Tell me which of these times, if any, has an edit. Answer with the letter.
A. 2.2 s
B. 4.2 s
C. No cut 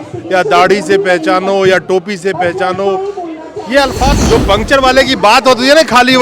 B